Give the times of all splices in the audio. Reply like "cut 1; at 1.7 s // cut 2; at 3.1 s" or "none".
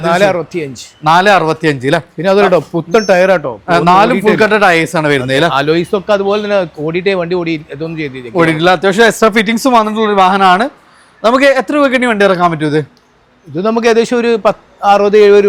none